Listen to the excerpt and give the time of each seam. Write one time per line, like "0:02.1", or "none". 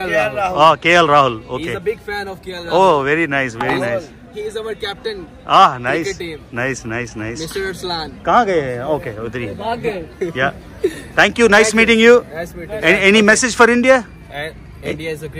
none